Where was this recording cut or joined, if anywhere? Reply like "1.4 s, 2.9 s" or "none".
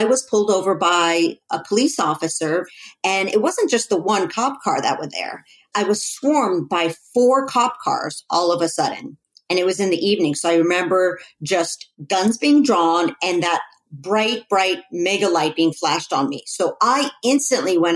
2.7 s